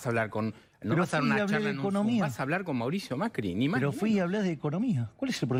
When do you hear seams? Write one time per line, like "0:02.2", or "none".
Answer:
none